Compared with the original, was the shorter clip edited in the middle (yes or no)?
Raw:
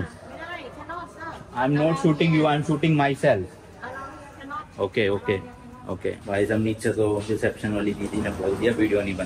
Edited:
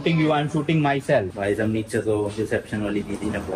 yes